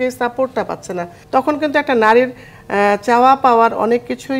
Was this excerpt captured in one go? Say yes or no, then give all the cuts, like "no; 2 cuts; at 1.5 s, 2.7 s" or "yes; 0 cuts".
no; 1 cut; at 1.2 s